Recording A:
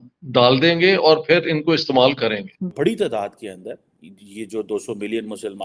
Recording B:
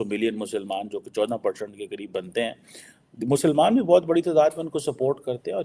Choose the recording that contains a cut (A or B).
A